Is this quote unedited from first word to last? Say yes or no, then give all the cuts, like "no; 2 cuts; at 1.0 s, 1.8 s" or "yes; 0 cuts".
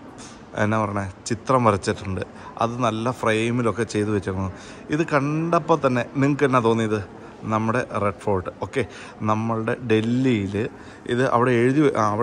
yes; 0 cuts